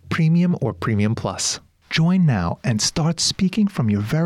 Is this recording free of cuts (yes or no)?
no